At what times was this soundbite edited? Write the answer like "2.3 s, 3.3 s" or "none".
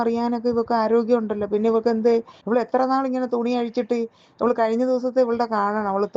2.3 s